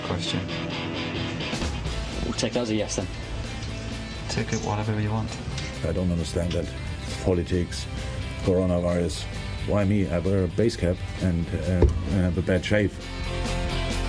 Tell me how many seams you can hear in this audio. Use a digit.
0